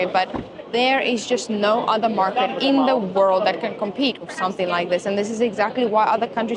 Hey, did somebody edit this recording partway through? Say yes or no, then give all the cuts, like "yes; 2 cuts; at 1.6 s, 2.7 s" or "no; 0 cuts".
no; 0 cuts